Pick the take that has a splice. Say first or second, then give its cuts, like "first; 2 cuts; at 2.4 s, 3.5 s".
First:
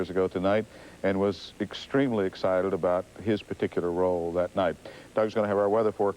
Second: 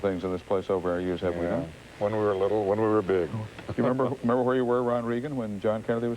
second; 1 cut; at 3.2 s